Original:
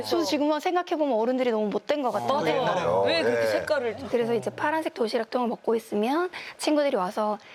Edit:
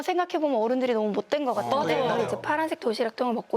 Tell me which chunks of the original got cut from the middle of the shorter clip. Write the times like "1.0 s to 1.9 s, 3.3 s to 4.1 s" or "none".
2.8 s to 4.3 s